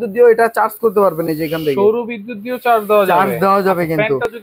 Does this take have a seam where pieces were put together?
no; 0 cuts

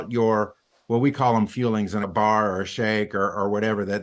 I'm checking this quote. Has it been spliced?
yes; 1 cut; at 2.1 s

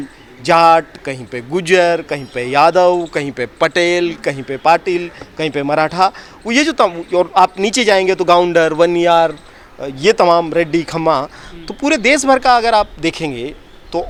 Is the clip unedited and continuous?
yes; 0 cuts

